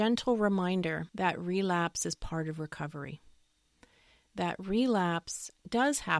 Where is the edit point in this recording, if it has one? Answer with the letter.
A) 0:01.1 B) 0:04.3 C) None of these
A